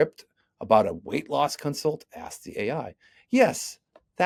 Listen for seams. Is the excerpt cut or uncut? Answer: uncut